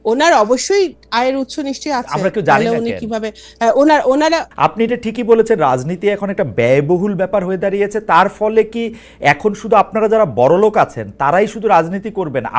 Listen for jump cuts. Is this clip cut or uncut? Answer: cut